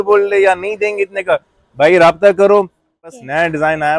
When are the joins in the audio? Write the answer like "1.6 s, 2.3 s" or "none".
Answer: 3.0 s